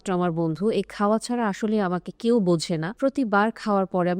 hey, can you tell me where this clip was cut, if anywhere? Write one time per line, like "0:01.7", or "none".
0:02.9